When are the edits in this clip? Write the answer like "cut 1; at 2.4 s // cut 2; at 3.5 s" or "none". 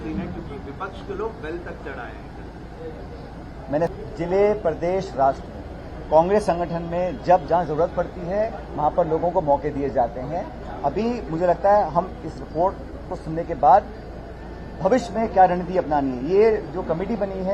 cut 1; at 3.9 s